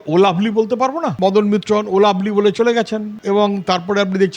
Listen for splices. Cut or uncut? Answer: cut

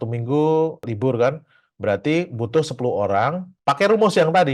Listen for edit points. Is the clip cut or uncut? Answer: uncut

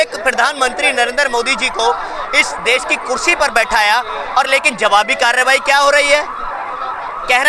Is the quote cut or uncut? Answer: uncut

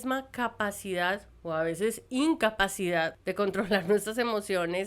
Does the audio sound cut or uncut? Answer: cut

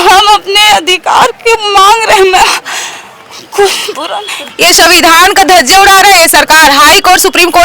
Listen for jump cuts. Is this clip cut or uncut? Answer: cut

